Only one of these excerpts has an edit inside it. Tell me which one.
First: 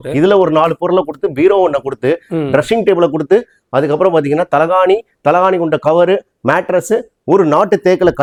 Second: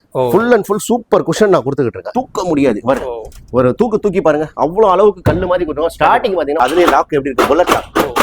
second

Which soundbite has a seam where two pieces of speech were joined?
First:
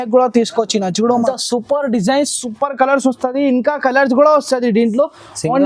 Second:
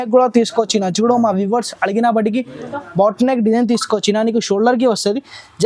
first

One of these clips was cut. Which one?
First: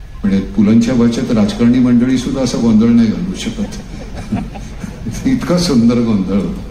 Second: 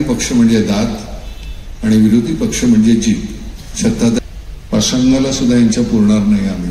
second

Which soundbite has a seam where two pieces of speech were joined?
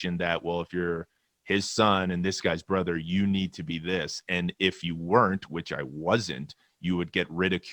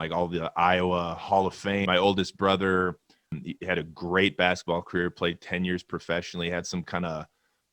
second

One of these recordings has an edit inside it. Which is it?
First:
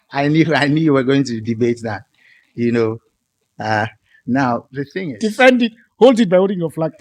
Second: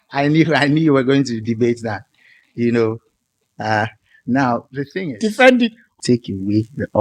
second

